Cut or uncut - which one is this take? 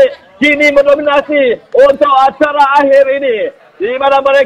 uncut